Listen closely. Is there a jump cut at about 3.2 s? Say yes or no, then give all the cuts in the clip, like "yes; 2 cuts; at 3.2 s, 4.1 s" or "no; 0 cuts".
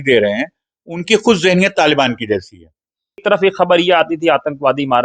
yes; 1 cut; at 3.2 s